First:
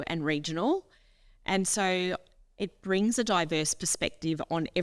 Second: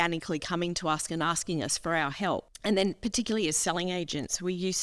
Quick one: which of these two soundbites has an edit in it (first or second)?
second